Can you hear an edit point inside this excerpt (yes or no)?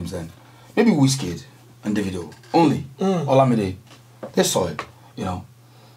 no